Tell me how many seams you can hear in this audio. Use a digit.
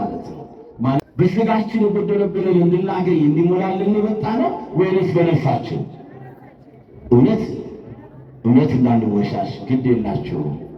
1